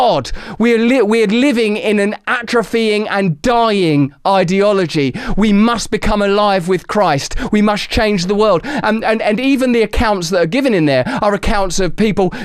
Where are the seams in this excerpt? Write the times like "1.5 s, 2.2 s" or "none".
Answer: none